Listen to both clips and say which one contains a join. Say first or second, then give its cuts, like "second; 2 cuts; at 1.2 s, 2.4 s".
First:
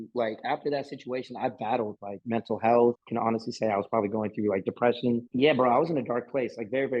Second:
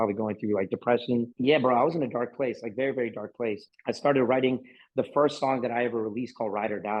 first; 1 cut; at 3.0 s